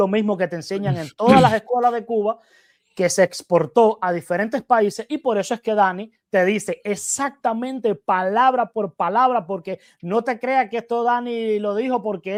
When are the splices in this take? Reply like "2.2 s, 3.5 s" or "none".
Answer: none

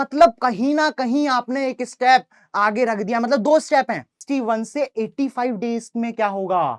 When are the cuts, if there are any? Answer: 4.1 s

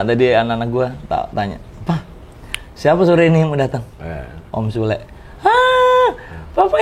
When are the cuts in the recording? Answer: 1.0 s

